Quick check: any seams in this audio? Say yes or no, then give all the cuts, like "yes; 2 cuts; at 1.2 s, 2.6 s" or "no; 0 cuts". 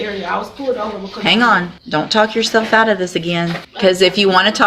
yes; 2 cuts; at 1.8 s, 3.6 s